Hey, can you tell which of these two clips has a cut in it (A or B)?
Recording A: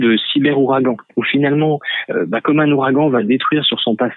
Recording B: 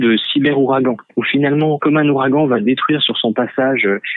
B